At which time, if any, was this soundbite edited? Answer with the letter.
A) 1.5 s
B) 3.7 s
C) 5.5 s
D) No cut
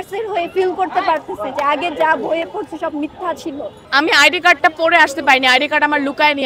B